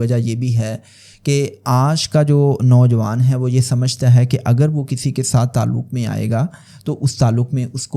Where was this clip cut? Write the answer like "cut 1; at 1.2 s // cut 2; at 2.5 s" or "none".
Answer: none

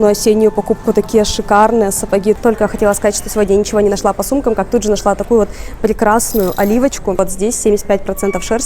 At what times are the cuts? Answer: cut 1; at 2.4 s // cut 2; at 7.2 s

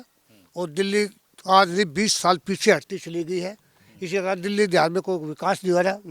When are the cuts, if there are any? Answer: none

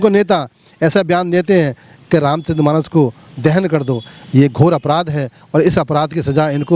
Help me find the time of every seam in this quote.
none

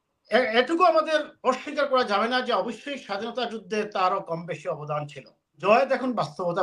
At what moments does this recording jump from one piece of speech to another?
cut 1; at 5.6 s

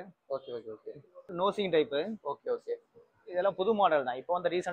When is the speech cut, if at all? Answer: cut 1; at 1.3 s

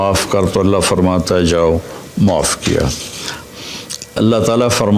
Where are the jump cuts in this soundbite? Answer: cut 1; at 3.4 s

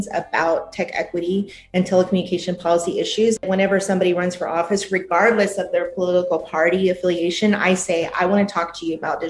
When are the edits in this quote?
cut 1; at 3.4 s

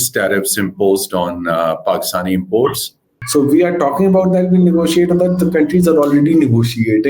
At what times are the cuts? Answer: cut 1; at 3.1 s

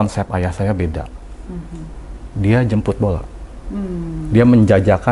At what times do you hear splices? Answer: none

